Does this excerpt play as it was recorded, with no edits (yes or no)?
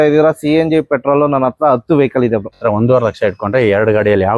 no